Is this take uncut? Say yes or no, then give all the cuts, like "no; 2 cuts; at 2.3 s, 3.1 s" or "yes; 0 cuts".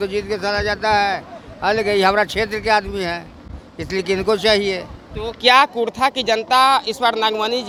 yes; 0 cuts